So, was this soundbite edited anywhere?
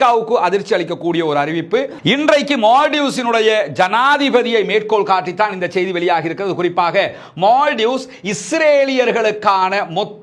yes; 1 cut; at 1.9 s

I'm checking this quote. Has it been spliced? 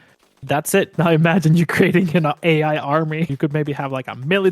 yes; 2 cuts; at 0.9 s, 3.3 s

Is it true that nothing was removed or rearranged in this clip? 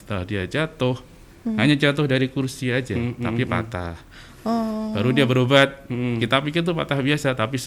yes; 0 cuts

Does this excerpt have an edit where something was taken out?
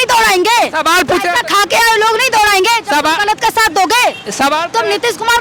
no; 0 cuts

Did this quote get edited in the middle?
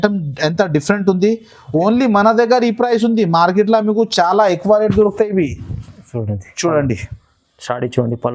no; 0 cuts

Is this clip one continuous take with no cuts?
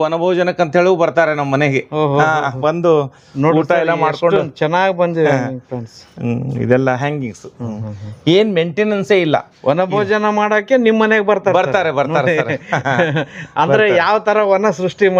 yes; 0 cuts

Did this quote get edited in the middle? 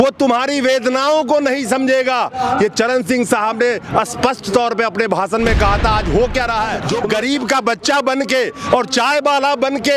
yes; 1 cut; at 6.8 s

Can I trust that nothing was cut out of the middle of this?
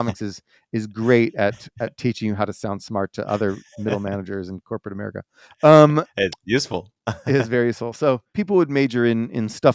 no; 1 cut; at 8.4 s

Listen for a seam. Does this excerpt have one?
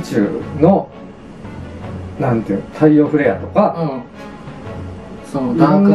no; 0 cuts

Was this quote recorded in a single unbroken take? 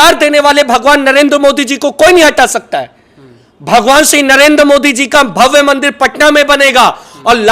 yes; 0 cuts

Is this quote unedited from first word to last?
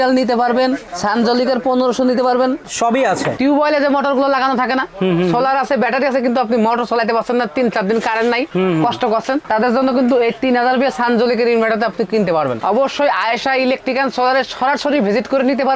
no; 2 cuts; at 3.4 s, 12.6 s

